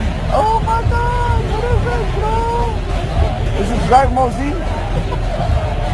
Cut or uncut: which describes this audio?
uncut